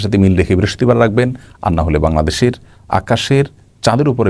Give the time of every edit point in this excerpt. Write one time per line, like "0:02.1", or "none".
none

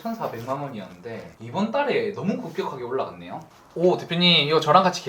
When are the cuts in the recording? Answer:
0:03.4

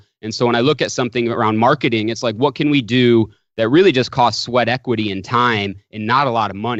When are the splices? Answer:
none

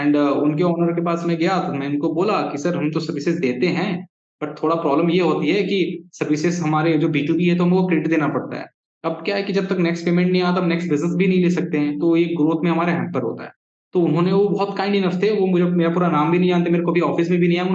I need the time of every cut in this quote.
none

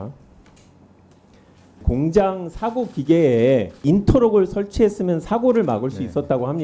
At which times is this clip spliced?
0:01.7

